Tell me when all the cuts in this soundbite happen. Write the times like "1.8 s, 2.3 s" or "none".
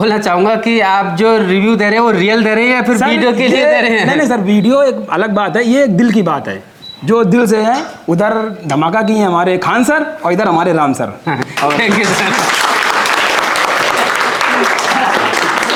none